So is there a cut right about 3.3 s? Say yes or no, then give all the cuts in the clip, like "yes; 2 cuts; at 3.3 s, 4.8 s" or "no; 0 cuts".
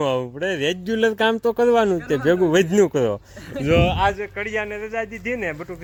no; 0 cuts